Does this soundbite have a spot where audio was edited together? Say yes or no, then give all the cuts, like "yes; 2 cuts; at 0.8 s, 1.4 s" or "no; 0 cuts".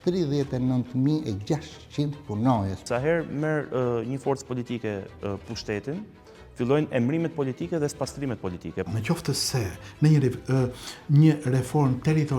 yes; 2 cuts; at 2.9 s, 8.9 s